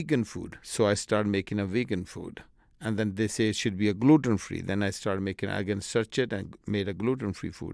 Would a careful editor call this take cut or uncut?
uncut